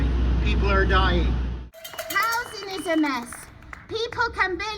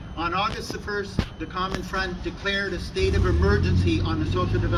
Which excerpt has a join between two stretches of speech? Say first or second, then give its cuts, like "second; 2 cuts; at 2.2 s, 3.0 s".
first; 1 cut; at 1.9 s